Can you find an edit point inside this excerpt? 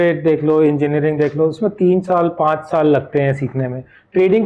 no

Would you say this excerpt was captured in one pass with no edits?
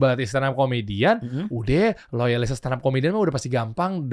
yes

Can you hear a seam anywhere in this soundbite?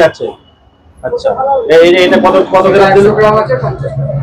no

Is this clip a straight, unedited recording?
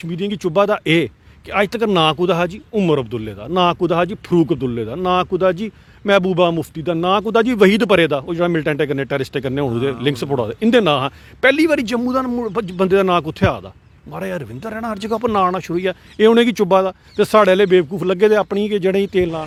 yes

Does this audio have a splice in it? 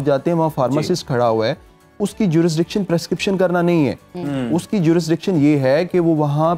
no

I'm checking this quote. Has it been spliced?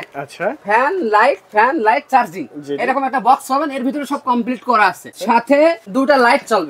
no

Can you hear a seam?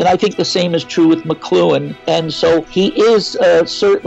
yes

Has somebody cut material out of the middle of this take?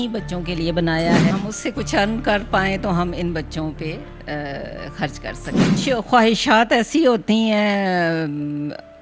yes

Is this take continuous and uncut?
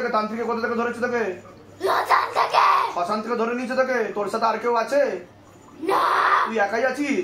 yes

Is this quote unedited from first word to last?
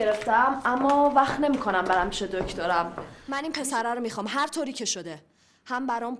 no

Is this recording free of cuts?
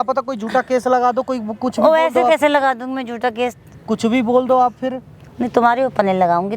yes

